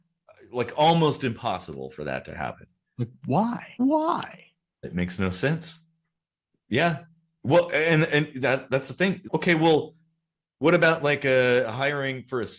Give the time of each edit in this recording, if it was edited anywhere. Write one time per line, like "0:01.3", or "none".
none